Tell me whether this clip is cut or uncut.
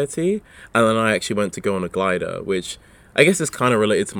uncut